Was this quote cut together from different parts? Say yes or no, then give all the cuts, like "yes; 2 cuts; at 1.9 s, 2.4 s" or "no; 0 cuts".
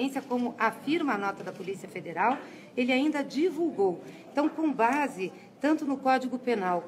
yes; 1 cut; at 3.7 s